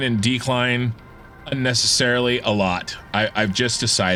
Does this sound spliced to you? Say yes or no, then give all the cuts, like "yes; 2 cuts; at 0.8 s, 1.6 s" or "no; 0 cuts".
no; 0 cuts